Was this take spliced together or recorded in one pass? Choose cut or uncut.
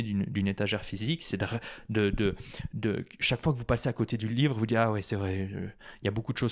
uncut